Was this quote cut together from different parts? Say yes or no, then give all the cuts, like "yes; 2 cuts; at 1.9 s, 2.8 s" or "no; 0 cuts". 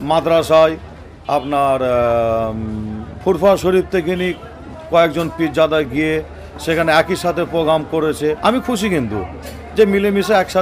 no; 0 cuts